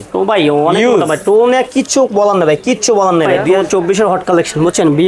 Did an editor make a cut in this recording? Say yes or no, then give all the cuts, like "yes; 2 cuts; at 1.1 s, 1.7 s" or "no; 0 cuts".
yes; 1 cut; at 3.5 s